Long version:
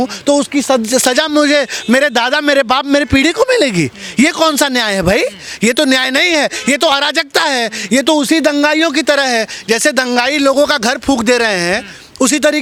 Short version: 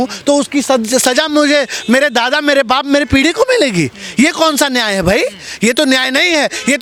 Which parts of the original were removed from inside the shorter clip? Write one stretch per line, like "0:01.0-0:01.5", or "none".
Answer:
none